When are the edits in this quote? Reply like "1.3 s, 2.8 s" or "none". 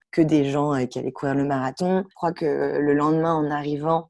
2.1 s